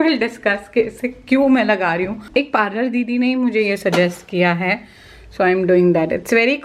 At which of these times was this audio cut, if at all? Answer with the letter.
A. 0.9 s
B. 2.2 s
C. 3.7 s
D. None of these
B